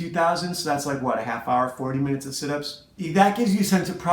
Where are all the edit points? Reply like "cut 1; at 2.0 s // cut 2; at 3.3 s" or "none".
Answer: cut 1; at 3.1 s